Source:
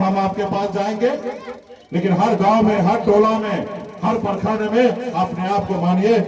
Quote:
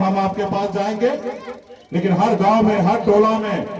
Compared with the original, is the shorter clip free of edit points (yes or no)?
yes